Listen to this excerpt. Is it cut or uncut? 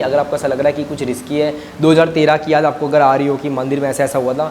uncut